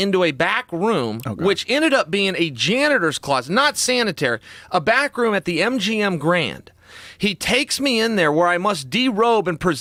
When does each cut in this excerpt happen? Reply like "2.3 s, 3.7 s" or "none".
none